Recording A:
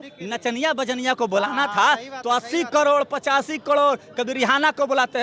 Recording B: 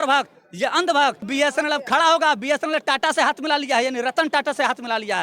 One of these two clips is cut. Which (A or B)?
B